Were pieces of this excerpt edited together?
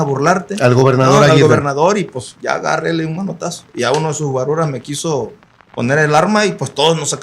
no; 0 cuts

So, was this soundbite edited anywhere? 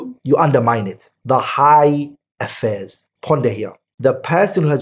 yes; 2 cuts; at 1.1 s, 3.8 s

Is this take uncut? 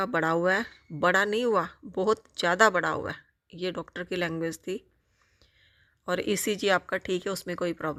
yes; 0 cuts

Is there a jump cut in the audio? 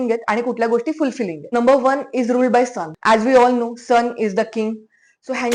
yes; 2 cuts; at 1.5 s, 2.9 s

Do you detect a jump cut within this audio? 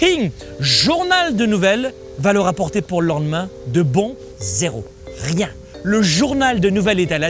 yes; 3 cuts; at 2.0 s, 4.2 s, 5.7 s

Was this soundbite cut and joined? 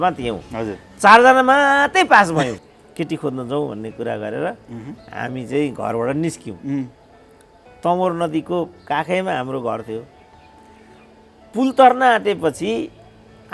yes; 1 cut; at 2.6 s

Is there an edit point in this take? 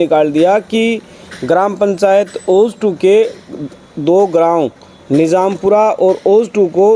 no; 0 cuts

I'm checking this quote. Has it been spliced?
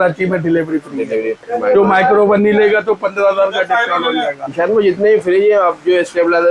yes; 2 cuts; at 1.4 s, 4.5 s

